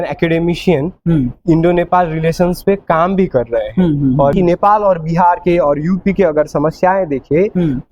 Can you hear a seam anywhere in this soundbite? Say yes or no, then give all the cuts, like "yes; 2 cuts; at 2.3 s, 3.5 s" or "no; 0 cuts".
yes; 1 cut; at 4.3 s